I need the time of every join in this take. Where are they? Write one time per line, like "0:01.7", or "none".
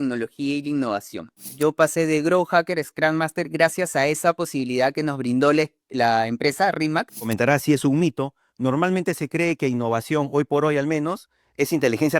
0:01.6
0:07.3